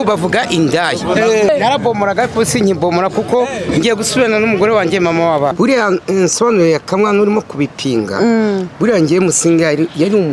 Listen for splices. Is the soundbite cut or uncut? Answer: cut